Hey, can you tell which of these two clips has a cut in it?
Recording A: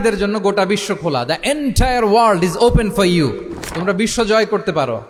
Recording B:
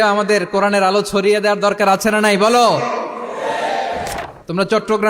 B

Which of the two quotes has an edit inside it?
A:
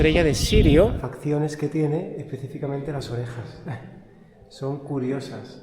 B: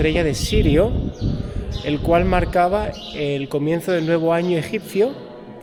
A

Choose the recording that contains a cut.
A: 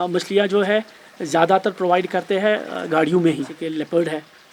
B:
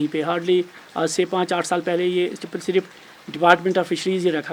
A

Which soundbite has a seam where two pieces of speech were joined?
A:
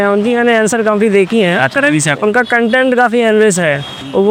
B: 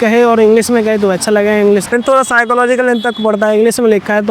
B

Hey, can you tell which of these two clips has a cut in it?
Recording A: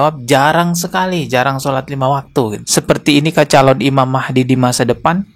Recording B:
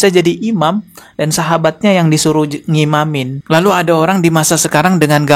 A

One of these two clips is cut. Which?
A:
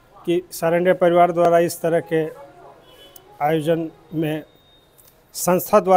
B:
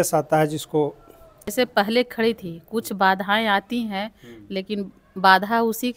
B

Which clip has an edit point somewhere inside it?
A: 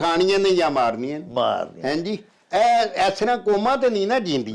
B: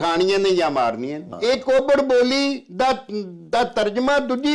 B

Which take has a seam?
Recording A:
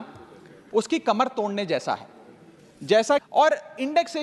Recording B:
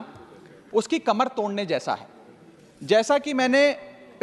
A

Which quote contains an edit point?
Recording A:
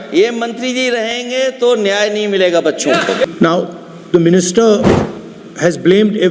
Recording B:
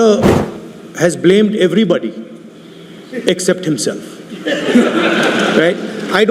A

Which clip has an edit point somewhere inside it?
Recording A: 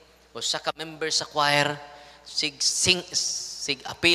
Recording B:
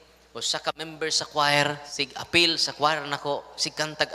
B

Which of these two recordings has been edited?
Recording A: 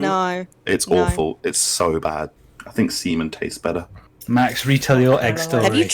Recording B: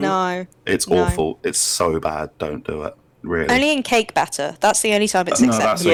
A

